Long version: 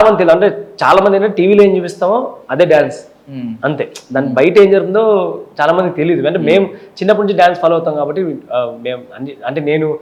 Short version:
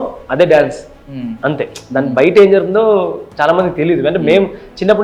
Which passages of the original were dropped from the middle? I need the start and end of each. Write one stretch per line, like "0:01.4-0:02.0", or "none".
none